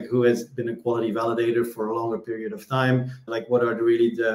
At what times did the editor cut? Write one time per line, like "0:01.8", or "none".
0:03.2